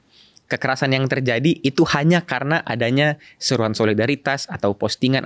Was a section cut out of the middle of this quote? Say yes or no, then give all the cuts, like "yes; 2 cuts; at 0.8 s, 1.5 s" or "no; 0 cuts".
no; 0 cuts